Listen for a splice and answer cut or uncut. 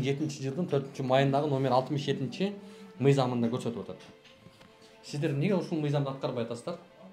uncut